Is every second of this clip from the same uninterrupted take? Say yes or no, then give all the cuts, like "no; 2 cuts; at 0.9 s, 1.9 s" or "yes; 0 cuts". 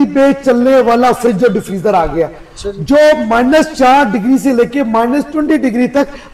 yes; 0 cuts